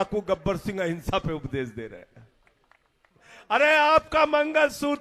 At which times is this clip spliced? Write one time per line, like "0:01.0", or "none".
0:03.3